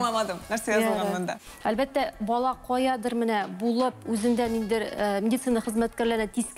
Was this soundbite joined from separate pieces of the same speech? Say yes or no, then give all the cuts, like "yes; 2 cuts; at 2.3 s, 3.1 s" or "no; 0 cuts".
yes; 1 cut; at 1.5 s